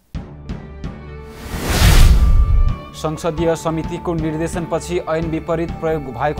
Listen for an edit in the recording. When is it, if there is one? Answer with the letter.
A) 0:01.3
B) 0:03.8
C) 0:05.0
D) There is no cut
D